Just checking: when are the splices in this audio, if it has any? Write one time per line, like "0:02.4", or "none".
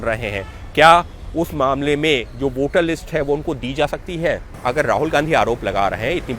0:04.5